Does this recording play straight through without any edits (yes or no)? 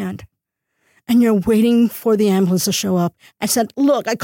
no